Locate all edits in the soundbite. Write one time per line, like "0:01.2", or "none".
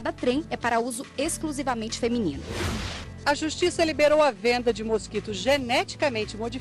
0:02.9